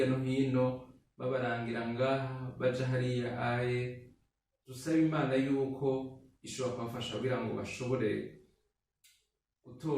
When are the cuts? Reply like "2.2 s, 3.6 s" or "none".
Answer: none